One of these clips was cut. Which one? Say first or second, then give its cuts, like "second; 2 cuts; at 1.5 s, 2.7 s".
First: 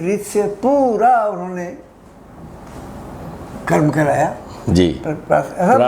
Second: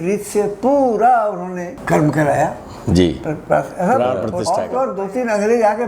second; 2 cuts; at 1.7 s, 4.4 s